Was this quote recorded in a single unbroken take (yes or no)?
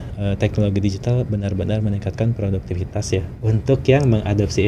yes